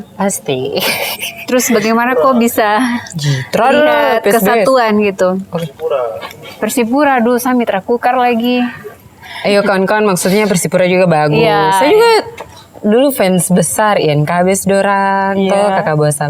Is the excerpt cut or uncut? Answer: uncut